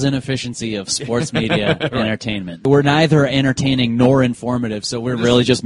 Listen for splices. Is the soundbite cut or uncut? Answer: cut